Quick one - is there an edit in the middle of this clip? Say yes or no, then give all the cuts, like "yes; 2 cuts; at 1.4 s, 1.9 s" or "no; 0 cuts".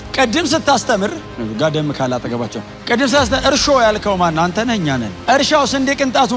yes; 3 cuts; at 1.3 s, 2.7 s, 5.1 s